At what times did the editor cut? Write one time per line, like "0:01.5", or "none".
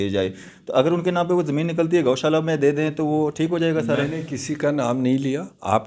none